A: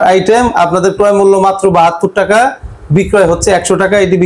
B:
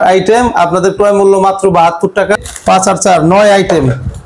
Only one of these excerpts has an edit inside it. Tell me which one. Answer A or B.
B